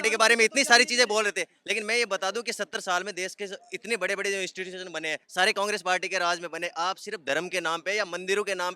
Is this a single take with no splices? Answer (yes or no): yes